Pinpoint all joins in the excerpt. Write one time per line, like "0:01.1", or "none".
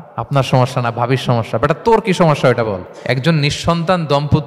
0:02.9